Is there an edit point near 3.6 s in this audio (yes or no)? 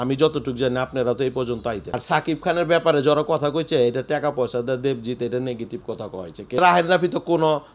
no